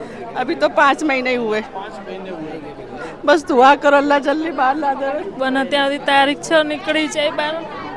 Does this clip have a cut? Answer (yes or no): yes